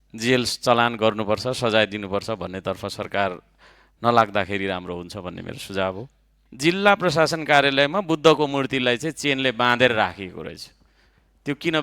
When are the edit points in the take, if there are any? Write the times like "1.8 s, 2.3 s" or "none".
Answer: 6.4 s